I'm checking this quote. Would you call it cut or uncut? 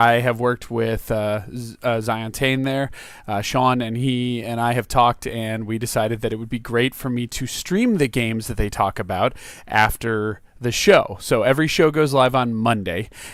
uncut